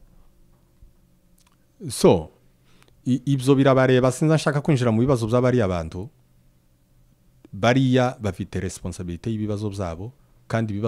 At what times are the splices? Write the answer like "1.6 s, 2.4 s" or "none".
none